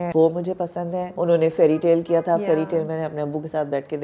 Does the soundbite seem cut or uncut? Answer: cut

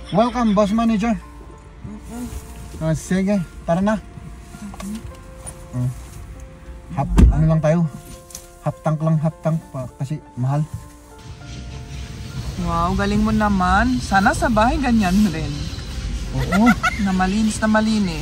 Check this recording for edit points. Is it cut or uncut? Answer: cut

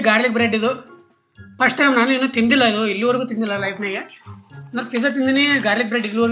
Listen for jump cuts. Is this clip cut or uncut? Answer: uncut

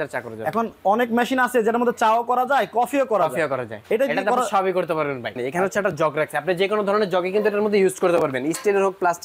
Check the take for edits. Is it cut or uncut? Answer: cut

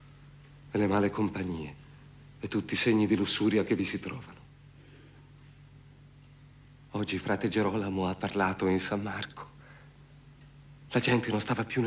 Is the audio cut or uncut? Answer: uncut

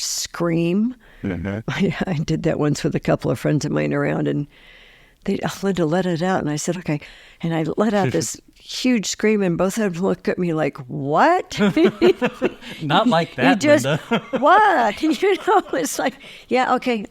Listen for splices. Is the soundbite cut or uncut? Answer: cut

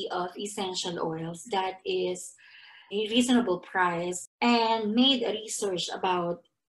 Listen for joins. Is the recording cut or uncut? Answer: cut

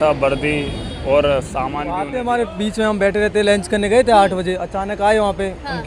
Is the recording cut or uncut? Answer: cut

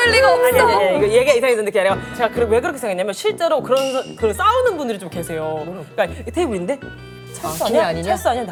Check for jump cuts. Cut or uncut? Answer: uncut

